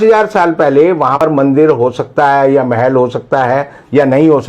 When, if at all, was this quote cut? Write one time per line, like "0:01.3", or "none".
0:01.2